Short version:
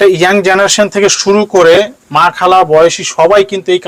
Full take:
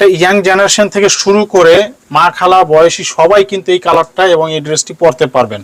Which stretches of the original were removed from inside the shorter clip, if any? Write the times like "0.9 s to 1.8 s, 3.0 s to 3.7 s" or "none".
none